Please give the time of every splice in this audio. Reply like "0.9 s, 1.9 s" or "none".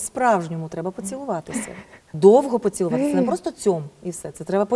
2.1 s